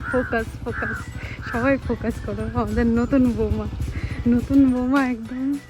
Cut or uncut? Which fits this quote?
uncut